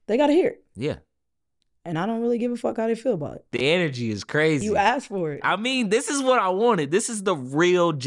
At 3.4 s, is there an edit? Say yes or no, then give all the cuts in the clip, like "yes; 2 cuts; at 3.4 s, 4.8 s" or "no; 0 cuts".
yes; 1 cut; at 3.4 s